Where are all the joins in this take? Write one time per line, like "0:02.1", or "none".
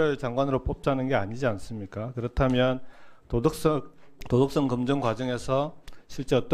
none